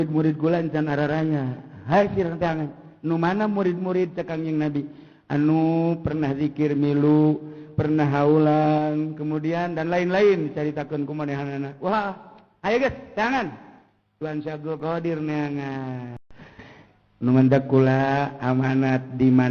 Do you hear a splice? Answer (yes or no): yes